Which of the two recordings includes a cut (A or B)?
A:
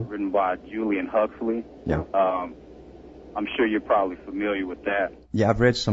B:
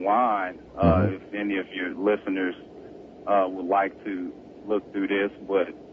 B